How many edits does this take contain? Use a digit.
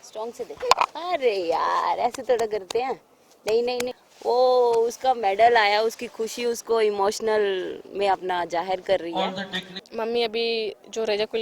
2